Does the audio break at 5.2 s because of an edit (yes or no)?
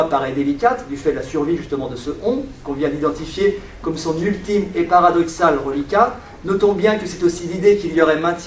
no